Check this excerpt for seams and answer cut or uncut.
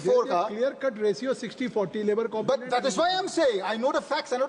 uncut